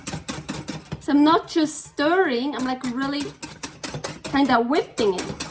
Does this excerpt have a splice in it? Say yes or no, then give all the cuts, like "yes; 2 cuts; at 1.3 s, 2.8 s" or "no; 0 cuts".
yes; 1 cut; at 3.8 s